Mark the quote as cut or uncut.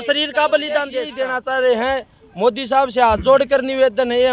cut